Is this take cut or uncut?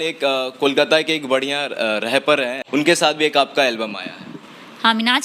cut